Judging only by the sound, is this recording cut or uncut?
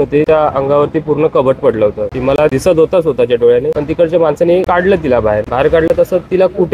uncut